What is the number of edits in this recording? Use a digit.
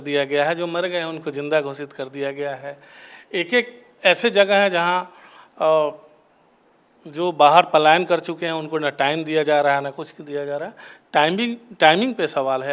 0